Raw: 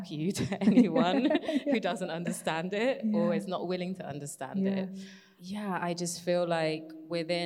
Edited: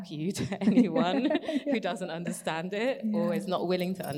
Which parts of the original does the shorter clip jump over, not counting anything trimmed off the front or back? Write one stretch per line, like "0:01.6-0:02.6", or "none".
none